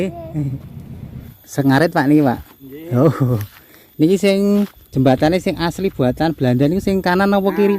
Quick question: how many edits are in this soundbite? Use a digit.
1